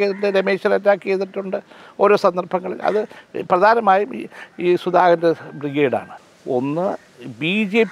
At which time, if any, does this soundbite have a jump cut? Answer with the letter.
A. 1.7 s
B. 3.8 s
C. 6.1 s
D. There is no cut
C